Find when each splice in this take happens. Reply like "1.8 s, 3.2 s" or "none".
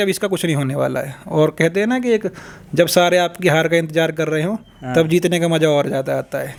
none

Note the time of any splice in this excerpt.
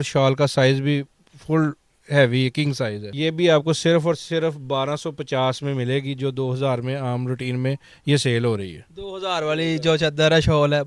none

